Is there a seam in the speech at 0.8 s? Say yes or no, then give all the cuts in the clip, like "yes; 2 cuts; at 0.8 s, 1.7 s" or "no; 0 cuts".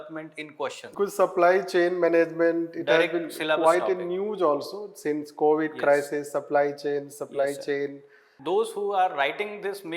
yes; 2 cuts; at 0.8 s, 8.4 s